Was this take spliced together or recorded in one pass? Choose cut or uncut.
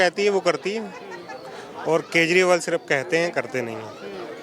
uncut